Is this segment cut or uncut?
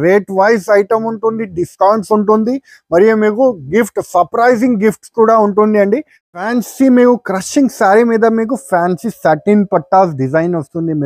cut